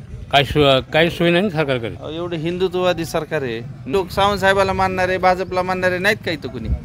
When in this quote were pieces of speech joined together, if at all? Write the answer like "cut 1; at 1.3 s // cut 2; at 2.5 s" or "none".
cut 1; at 3.9 s